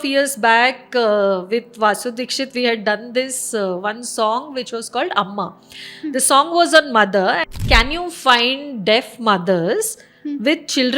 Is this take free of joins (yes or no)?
no